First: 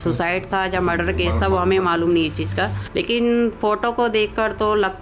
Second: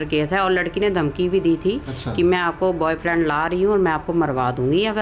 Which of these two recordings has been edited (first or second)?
first